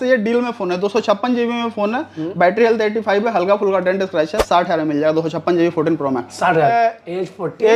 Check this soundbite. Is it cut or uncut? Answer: cut